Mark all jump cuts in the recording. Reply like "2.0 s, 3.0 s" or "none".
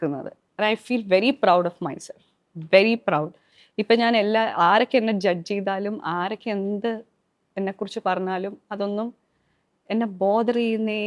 none